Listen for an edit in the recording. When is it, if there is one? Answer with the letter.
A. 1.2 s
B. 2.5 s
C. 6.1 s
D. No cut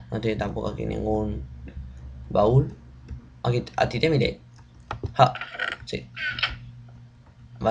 B